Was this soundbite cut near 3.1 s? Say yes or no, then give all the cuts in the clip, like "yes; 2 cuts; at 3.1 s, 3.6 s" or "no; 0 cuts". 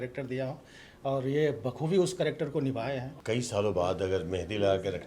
yes; 1 cut; at 3.1 s